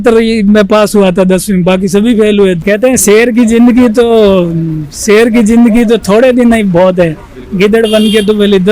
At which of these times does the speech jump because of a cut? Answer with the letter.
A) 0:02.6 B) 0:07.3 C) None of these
A